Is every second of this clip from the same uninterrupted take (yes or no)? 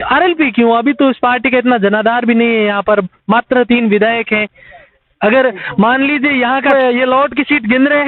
no